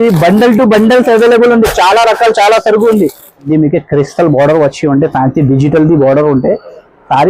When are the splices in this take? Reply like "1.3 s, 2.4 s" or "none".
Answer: 3.5 s